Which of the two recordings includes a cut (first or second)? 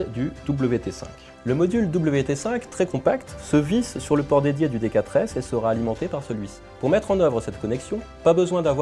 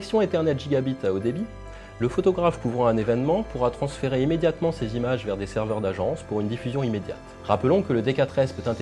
first